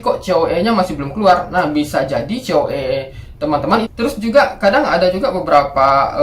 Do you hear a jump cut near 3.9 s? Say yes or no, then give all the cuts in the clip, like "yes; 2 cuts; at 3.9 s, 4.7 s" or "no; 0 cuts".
yes; 1 cut; at 3.9 s